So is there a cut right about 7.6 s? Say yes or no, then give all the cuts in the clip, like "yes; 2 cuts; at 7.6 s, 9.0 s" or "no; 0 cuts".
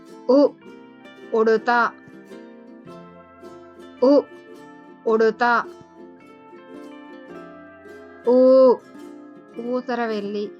yes; 4 cuts; at 1.9 s, 3.6 s, 5.6 s, 7.6 s